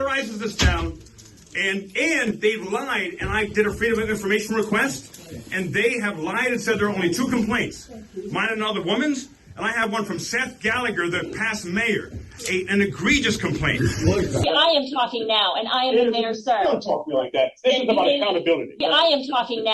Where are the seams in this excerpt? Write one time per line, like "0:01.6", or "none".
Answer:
0:14.4
0:18.7